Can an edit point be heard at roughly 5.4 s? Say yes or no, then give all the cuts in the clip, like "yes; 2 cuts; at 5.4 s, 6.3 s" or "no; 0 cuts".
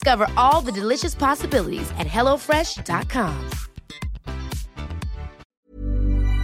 yes; 1 cut; at 5.4 s